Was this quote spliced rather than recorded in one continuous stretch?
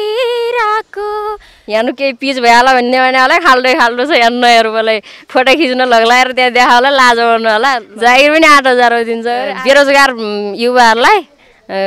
yes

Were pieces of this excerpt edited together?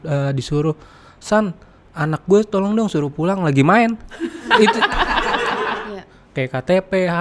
yes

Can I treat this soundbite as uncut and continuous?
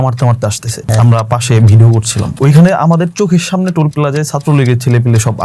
no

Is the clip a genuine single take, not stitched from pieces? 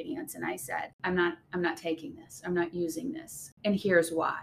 no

